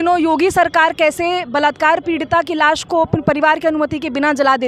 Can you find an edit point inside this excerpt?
no; 0 cuts

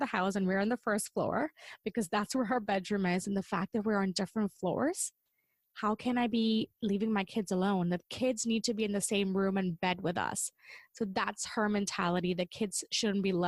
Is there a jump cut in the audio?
no; 0 cuts

